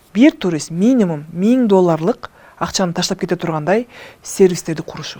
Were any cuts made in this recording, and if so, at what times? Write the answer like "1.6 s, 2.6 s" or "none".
none